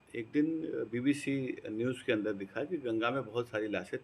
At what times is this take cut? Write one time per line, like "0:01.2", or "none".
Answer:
none